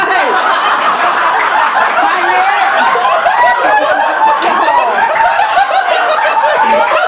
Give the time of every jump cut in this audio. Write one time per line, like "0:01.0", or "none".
none